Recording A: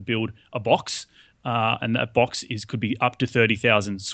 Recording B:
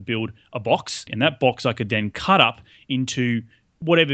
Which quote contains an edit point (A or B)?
B